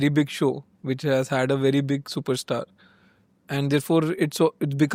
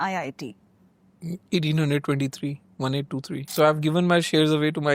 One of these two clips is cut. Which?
second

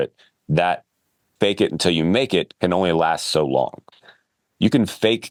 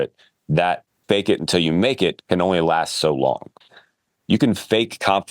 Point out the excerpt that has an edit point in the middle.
second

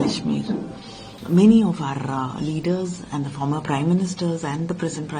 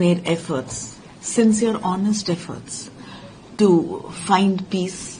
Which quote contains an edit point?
first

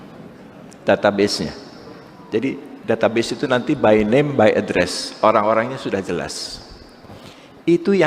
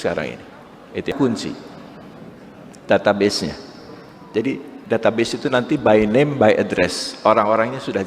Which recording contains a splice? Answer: second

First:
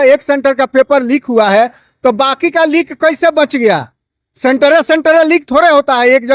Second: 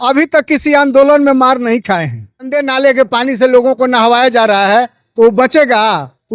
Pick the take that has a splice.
second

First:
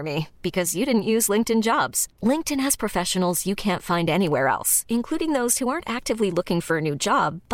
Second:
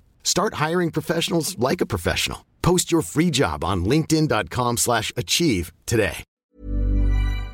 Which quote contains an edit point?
second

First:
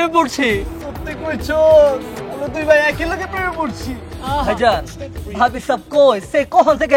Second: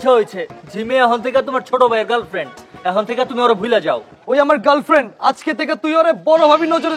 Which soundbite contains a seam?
first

